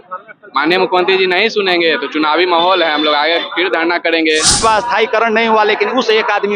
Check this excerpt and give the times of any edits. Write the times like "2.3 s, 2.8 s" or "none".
4.6 s